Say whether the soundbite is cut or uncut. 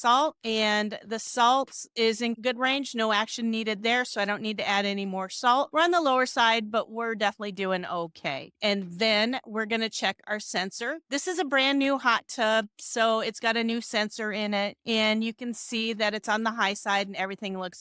uncut